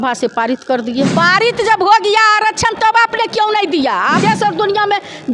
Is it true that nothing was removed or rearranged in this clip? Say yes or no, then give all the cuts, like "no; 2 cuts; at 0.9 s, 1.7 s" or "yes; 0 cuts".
no; 2 cuts; at 1.1 s, 4.2 s